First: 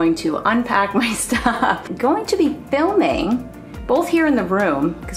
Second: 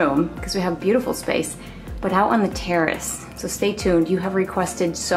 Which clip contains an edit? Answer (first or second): first